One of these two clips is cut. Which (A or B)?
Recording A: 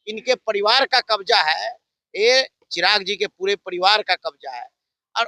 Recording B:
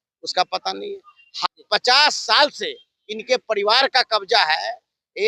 B